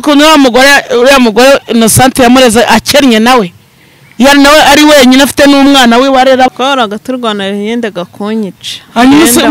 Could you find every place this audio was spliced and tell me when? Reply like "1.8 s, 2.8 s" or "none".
6.5 s

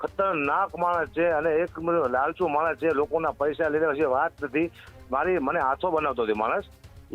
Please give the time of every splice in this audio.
none

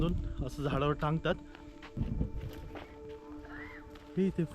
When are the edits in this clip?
1.8 s

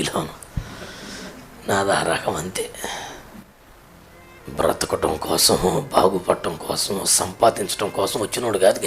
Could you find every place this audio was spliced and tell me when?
3.7 s

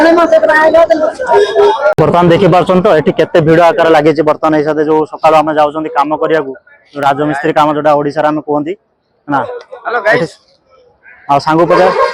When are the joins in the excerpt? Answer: none

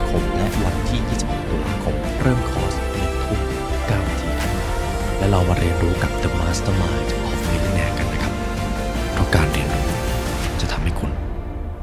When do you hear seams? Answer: 2.2 s

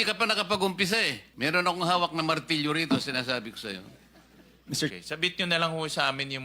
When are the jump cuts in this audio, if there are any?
1.2 s, 4.9 s

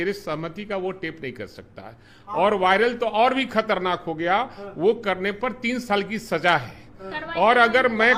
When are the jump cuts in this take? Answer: none

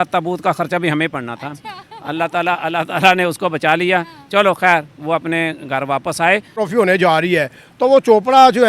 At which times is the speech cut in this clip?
6.5 s

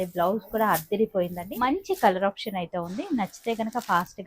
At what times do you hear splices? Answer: 1.5 s

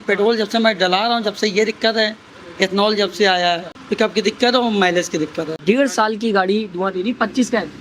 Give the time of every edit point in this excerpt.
3.8 s, 5.5 s

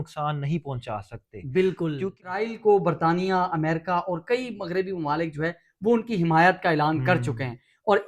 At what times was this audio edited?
2.3 s

